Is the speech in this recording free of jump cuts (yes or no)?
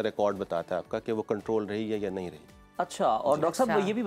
yes